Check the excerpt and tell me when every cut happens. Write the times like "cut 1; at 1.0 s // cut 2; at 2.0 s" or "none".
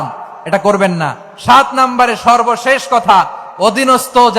none